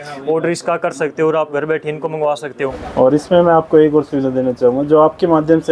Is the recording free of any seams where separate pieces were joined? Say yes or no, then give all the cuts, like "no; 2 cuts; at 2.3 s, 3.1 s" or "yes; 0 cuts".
no; 1 cut; at 2.8 s